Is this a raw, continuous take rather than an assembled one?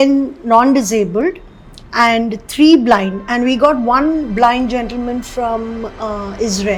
yes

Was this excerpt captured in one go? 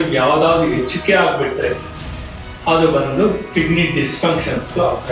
yes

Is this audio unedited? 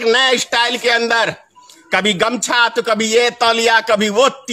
yes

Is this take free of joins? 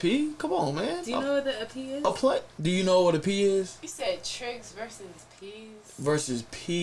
no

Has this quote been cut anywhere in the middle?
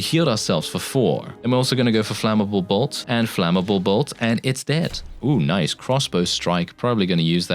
yes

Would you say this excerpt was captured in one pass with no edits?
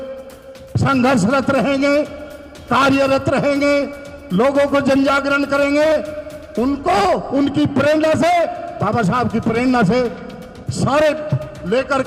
yes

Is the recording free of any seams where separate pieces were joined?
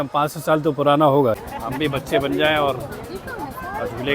no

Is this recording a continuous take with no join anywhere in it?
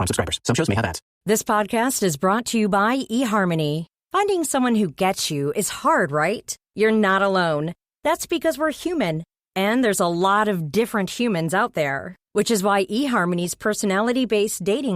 no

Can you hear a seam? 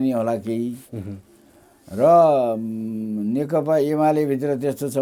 no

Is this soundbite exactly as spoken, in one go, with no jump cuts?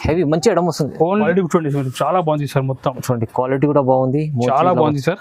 no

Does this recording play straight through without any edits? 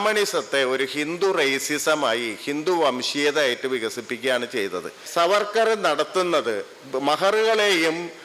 no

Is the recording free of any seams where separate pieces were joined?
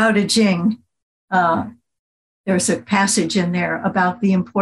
yes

